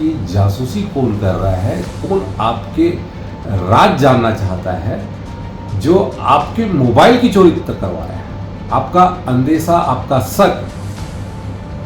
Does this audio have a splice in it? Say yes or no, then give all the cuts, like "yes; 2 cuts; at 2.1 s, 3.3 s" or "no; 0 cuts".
no; 0 cuts